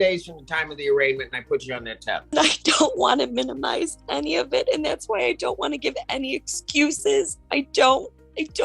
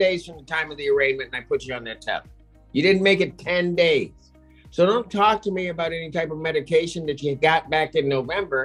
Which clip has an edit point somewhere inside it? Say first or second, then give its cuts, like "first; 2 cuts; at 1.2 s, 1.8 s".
first; 1 cut; at 2.3 s